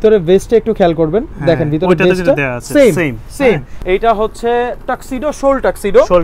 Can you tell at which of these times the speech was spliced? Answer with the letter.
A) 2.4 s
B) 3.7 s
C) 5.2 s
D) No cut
B